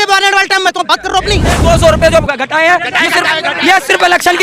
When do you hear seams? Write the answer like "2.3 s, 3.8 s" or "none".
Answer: 1.6 s